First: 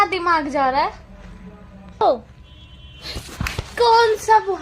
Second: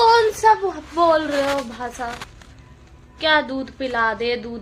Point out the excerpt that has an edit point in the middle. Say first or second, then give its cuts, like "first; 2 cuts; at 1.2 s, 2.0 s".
first; 1 cut; at 2.0 s